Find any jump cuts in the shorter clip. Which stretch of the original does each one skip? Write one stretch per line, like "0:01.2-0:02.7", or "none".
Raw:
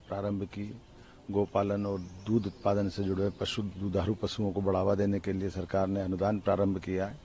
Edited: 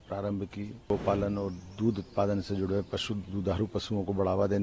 0:00.9-0:01.4

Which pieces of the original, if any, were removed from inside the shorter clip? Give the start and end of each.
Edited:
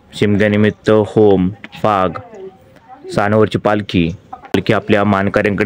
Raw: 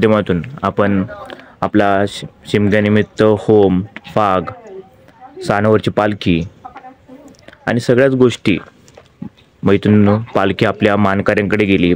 0:06.9-0:10.5

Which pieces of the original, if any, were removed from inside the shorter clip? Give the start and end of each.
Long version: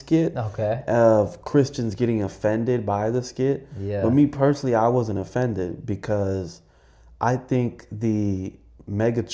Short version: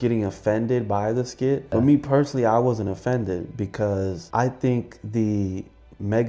0:03.6-0:04.0
0:06.5-0:07.1

